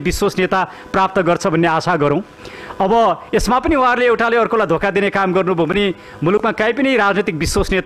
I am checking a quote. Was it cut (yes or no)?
no